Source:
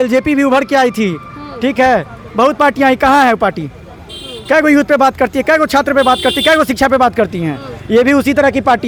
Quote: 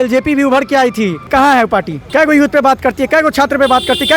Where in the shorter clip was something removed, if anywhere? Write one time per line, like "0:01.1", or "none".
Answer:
0:01.3
0:02.0

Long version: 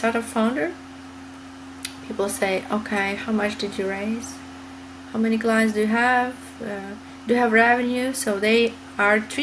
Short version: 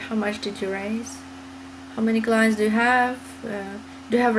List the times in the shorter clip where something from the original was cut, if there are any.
none

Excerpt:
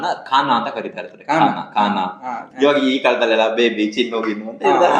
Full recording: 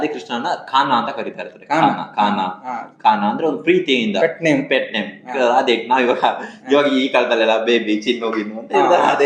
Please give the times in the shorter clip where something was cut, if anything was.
0:02.4

